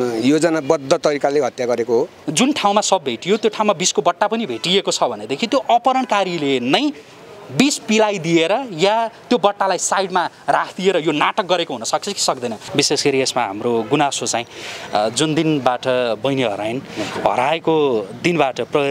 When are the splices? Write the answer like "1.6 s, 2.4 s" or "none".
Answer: 2.2 s, 12.6 s